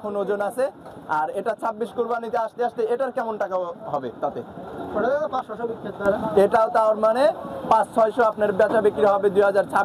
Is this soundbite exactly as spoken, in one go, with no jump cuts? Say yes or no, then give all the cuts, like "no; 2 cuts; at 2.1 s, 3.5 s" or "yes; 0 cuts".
yes; 0 cuts